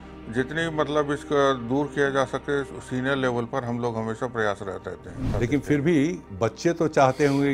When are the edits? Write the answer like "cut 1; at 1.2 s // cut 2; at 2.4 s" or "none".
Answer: cut 1; at 5.3 s